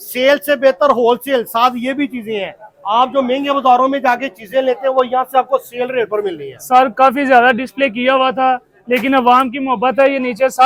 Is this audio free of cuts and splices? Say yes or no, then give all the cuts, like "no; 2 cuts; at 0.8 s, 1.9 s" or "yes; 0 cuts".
yes; 0 cuts